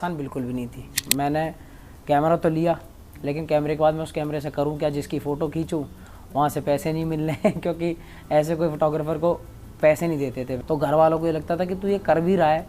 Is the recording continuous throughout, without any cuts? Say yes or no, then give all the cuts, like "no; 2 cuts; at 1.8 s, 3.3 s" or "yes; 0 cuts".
no; 2 cuts; at 1.0 s, 10.6 s